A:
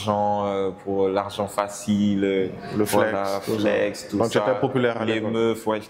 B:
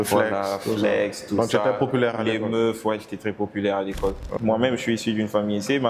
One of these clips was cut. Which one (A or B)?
B